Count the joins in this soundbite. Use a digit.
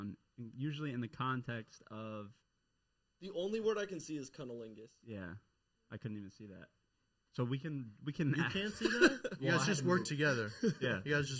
0